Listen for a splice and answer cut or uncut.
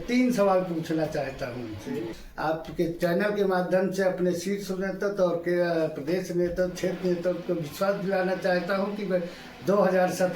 cut